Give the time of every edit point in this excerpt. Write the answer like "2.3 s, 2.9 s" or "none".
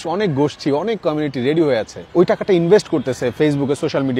2.0 s